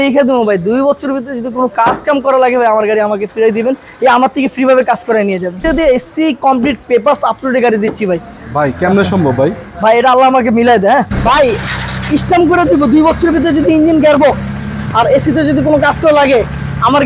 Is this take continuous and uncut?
no; 2 cuts; at 5.6 s, 11.1 s

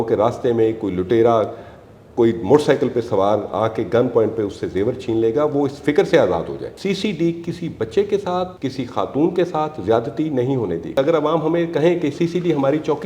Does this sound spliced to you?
yes; 2 cuts; at 6.7 s, 11.0 s

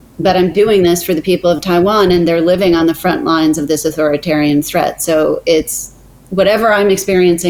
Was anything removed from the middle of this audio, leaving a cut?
no; 0 cuts

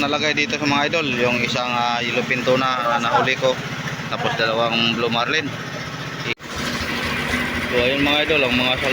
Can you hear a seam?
yes; 1 cut; at 6.3 s

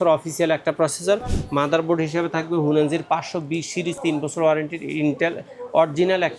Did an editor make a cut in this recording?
no; 0 cuts

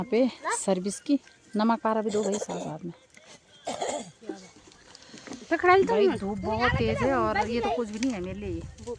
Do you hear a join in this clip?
yes; 1 cut; at 1.4 s

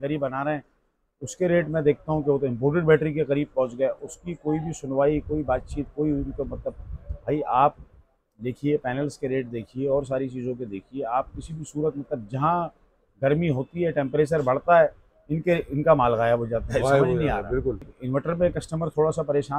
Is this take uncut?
no; 1 cut; at 17.9 s

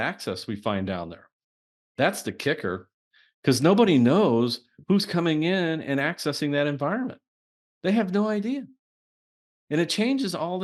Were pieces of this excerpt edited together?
no; 0 cuts

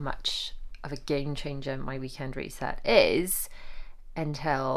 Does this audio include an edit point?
no; 0 cuts

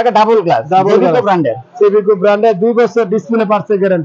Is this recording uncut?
yes; 0 cuts

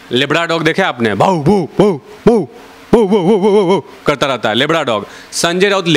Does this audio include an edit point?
no; 0 cuts

